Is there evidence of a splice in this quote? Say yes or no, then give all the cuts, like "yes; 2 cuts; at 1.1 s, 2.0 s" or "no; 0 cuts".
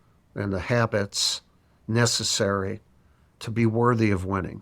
yes; 1 cut; at 3.4 s